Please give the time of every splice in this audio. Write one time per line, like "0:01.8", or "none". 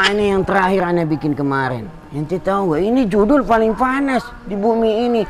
none